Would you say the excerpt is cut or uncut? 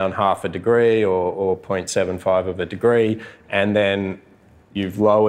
uncut